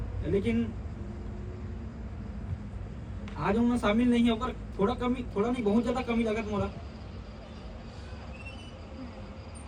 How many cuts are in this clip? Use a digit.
0